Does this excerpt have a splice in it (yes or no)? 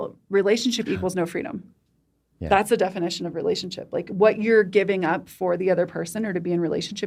no